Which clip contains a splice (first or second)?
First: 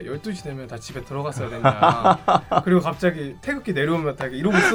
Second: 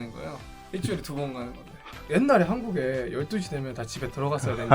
second